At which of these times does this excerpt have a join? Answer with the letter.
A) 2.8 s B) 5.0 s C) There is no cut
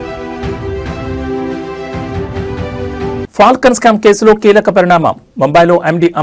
A